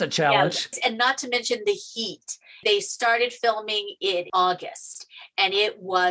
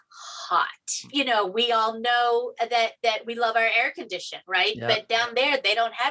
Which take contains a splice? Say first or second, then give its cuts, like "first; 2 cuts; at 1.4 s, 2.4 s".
second; 1 cut; at 1.0 s